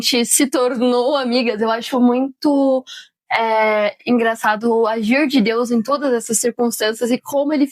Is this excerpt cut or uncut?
uncut